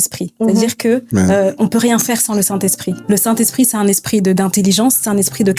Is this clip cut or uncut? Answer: cut